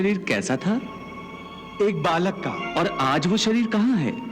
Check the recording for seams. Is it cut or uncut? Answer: cut